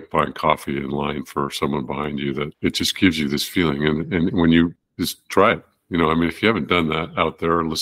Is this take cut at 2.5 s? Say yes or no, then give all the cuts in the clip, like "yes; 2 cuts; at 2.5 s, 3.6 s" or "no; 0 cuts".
yes; 2 cuts; at 2.5 s, 4.8 s